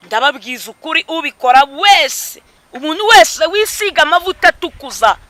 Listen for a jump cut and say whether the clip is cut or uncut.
uncut